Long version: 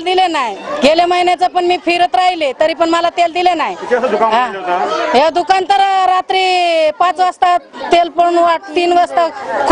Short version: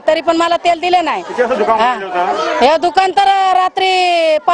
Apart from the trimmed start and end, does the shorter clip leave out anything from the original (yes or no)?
no